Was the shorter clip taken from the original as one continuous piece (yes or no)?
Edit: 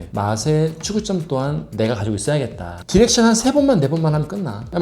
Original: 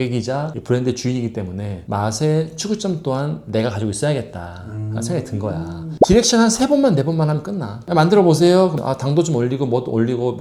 no